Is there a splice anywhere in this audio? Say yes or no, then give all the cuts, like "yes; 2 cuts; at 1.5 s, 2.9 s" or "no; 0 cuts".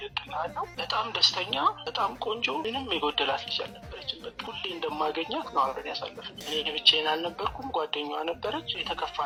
no; 0 cuts